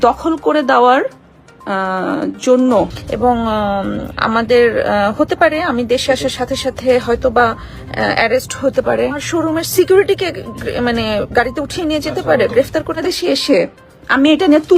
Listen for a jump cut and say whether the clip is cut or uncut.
cut